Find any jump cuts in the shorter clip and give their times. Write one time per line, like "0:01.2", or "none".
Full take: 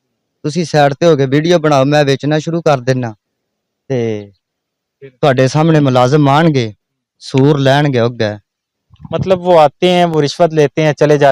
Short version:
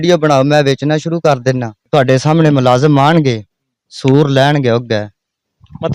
0:01.7